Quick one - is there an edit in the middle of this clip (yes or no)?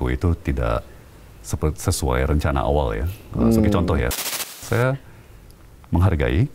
yes